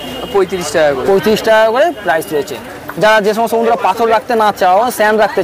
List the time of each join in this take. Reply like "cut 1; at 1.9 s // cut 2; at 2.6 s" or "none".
none